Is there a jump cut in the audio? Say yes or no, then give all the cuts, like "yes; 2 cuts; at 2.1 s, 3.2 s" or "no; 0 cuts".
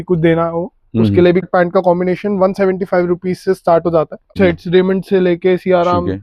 yes; 2 cuts; at 1.4 s, 4.3 s